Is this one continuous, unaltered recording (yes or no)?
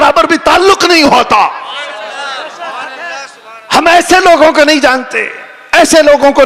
yes